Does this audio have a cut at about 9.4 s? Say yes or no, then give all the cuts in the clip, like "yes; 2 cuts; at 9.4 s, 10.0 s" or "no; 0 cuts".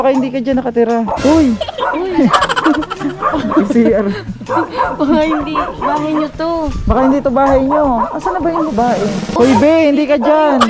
yes; 2 cuts; at 1.1 s, 9.4 s